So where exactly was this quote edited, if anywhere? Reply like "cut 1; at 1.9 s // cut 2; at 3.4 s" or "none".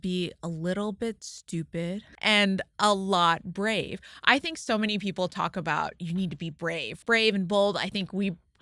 cut 1; at 2.1 s // cut 2; at 6.9 s